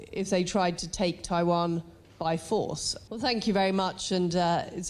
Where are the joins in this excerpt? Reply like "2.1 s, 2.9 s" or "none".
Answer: 2.9 s